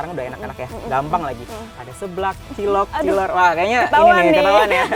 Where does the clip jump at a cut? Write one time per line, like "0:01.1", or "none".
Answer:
none